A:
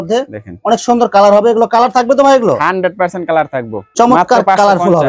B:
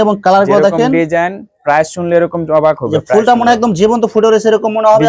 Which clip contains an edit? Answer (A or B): A